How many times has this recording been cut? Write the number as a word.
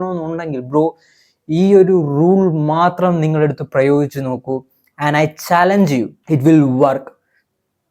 one